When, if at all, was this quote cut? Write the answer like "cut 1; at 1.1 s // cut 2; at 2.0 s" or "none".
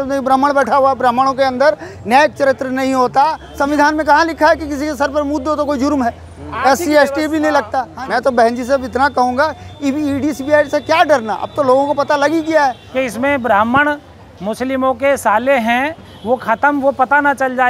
cut 1; at 3.4 s // cut 2; at 8.0 s // cut 3; at 12.8 s

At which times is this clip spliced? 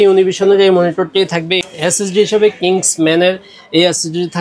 cut 1; at 1.6 s

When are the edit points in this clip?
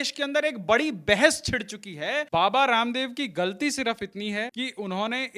cut 1; at 2.2 s // cut 2; at 4.5 s

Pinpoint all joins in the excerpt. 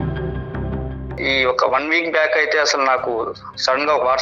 cut 1; at 1.2 s

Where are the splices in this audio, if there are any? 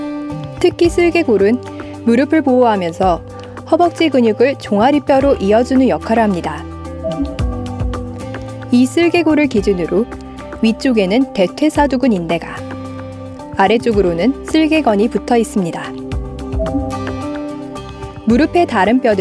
none

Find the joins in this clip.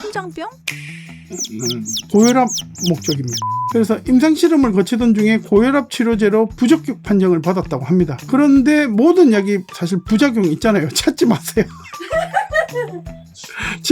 cut 1; at 1.2 s // cut 2; at 3.4 s

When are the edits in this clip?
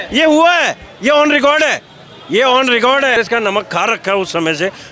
cut 1; at 3.2 s

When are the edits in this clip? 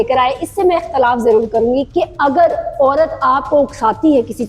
cut 1; at 1.9 s

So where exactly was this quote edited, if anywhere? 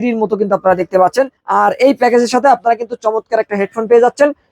cut 1; at 1.4 s

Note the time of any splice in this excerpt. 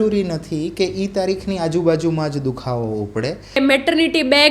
cut 1; at 3.6 s

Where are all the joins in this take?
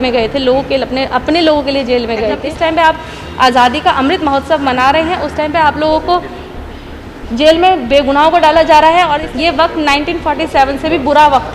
cut 1; at 2.5 s // cut 2; at 9.2 s

